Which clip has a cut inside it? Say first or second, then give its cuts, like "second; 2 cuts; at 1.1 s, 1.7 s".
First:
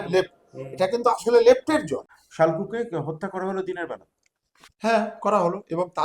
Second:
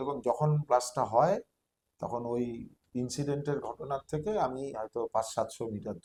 first; 1 cut; at 2.2 s